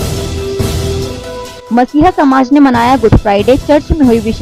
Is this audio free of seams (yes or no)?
yes